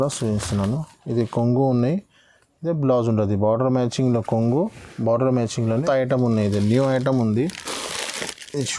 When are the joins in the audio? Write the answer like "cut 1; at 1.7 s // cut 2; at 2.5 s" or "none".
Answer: cut 1; at 5.7 s